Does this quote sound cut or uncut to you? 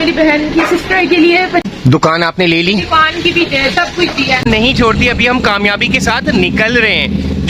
cut